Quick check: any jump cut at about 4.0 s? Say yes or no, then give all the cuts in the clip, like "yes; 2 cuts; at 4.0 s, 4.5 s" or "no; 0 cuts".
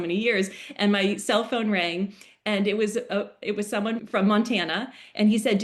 yes; 1 cut; at 4.0 s